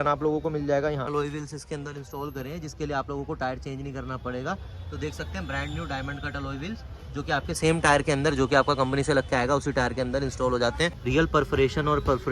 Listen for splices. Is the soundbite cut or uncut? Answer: cut